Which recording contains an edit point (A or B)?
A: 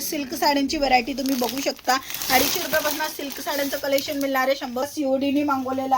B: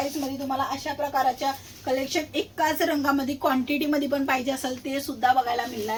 A